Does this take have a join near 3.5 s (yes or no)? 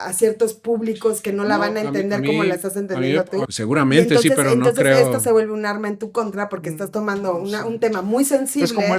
yes